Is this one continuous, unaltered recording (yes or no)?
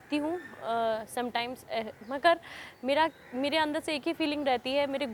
yes